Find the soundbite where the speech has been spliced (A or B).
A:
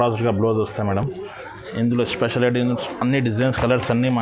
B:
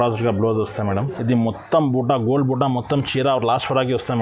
B